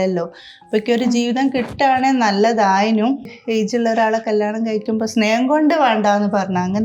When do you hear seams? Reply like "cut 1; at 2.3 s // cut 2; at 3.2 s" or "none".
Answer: cut 1; at 3.3 s